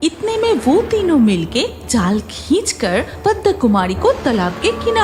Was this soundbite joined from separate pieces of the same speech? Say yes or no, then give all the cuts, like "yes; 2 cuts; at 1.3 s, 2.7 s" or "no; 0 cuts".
no; 0 cuts